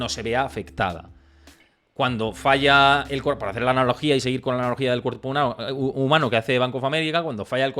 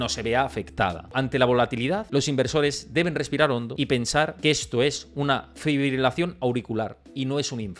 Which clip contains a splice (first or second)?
second